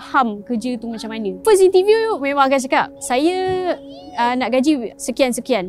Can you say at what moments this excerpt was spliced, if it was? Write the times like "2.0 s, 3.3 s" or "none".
1.3 s, 3.0 s, 4.9 s